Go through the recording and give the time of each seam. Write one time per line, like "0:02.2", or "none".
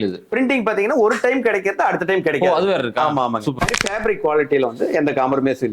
0:03.6